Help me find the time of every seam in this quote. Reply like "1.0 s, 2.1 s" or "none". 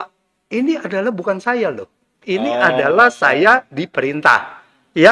none